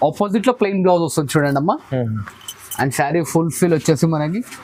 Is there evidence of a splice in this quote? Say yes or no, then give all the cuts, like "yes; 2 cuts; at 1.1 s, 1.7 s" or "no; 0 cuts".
no; 0 cuts